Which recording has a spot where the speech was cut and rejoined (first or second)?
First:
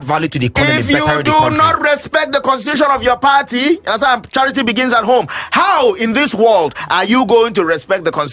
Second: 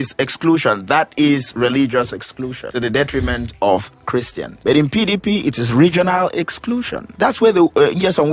second